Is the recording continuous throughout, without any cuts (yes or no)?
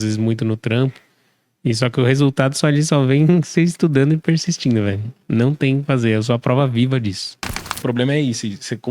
no